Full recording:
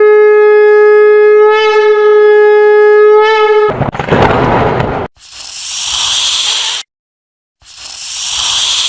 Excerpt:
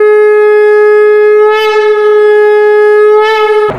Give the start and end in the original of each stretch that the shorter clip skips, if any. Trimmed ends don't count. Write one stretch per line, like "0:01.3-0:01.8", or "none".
none

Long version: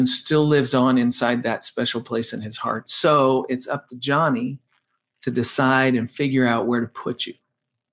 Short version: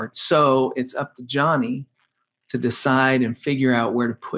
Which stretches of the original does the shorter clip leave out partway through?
none

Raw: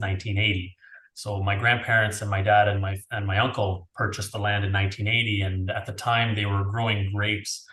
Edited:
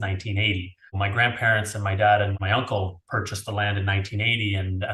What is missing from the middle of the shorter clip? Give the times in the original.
0:00.9-0:01.4
0:02.8-0:03.2

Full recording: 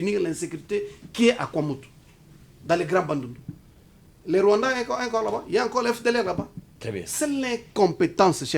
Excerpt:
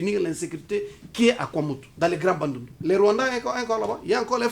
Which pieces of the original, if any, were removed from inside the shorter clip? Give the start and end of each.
0:01.8-0:02.5
0:03.4-0:04.1

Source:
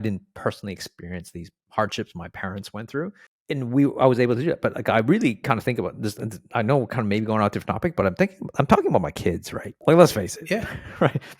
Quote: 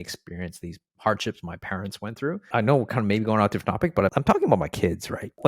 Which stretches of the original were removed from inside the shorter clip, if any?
0:03.1-0:06.4
0:08.1-0:08.6

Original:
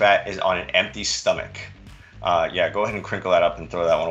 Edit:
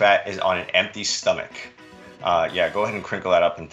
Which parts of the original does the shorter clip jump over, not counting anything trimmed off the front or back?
none

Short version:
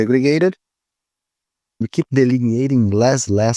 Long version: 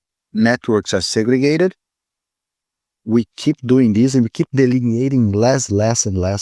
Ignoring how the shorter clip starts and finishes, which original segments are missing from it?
0:03.0-0:04.3

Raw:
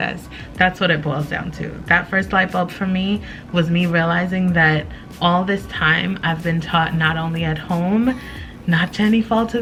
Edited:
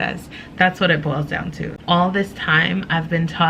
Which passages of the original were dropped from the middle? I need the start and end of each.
0:01.7-0:05.0

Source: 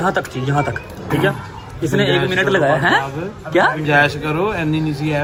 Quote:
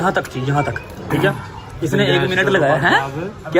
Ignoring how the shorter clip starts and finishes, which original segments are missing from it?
none

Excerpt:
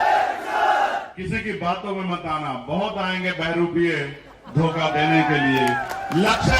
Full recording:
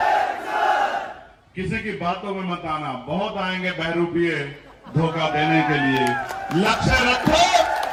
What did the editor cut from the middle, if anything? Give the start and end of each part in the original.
0:01.1-0:01.5

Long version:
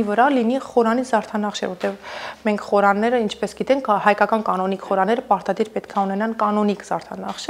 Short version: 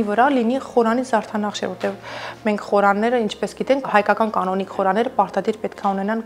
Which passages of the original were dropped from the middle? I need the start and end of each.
0:03.9-0:04.0

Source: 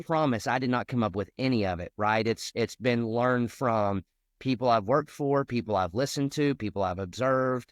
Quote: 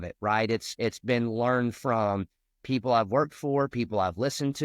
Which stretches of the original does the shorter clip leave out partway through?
none

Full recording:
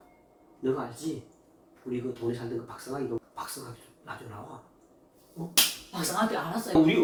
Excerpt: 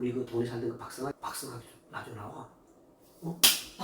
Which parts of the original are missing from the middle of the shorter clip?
0:03.0-0:03.2

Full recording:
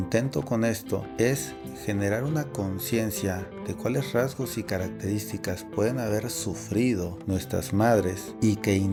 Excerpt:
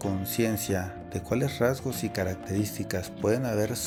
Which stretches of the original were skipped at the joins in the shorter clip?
none

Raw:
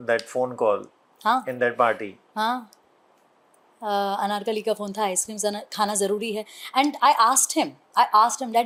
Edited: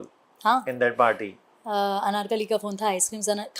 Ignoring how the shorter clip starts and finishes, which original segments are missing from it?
0:02.2-0:03.5

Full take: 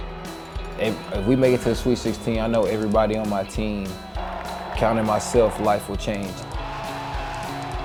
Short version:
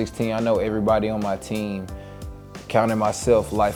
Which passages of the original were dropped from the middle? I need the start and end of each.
none

